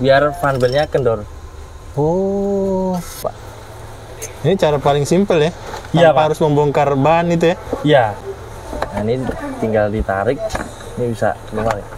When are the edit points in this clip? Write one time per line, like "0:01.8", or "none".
0:03.2
0:08.2

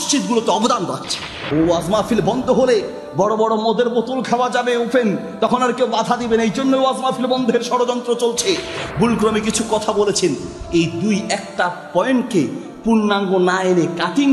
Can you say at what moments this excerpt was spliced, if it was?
0:01.3
0:08.8

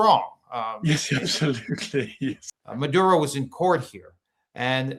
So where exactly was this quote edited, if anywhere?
0:02.4

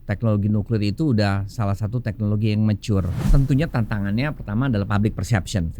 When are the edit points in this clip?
0:03.3

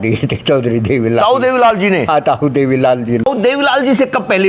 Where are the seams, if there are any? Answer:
0:03.3

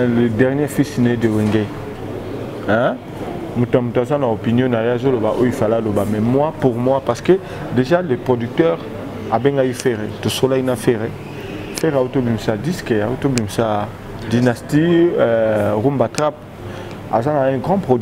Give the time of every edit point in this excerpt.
none

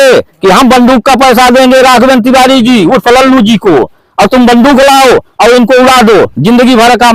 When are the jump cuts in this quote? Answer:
none

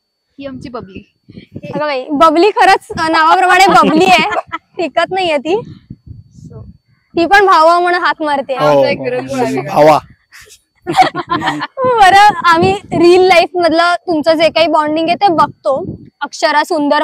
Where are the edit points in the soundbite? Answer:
none

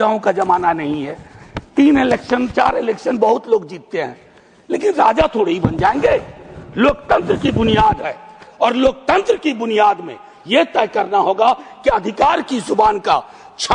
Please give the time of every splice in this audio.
none

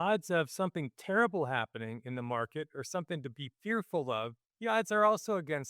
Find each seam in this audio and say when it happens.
0:04.4

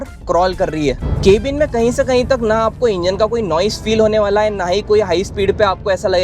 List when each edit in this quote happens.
0:01.1

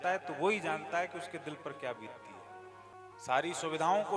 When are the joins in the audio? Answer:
0:03.0

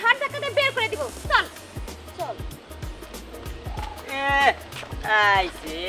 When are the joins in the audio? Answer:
none

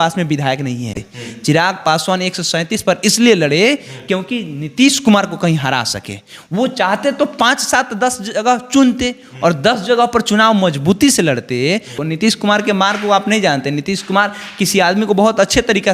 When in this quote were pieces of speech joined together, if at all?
0:01.0
0:11.9

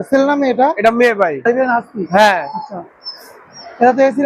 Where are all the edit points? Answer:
0:01.5

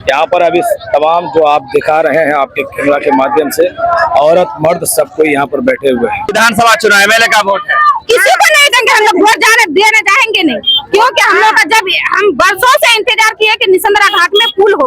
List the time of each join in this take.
0:06.3

